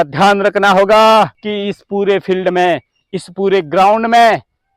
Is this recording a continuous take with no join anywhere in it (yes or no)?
no